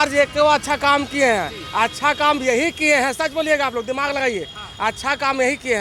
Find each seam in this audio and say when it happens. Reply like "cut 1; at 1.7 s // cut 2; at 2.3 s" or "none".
none

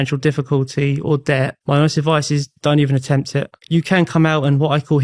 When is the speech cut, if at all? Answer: cut 1; at 1.6 s // cut 2; at 2.5 s // cut 3; at 3.5 s

